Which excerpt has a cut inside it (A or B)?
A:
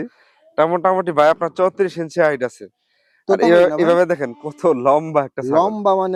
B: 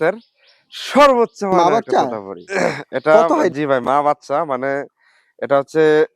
B